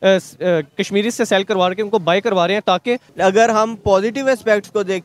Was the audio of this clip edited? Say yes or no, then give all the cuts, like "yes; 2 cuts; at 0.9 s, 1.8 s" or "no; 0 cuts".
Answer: yes; 1 cut; at 3.1 s